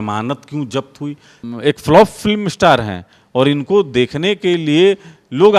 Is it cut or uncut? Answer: cut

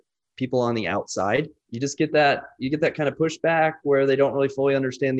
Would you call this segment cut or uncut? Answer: cut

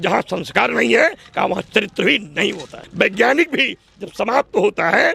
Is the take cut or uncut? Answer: cut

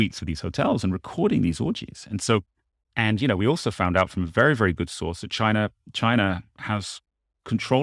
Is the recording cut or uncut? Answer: cut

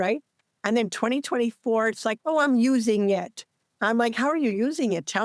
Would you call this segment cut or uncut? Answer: cut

